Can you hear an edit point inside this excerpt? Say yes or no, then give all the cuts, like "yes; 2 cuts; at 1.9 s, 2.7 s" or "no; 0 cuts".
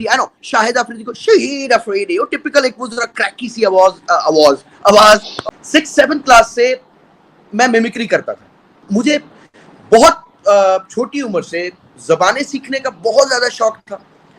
yes; 2 cuts; at 5.3 s, 8.8 s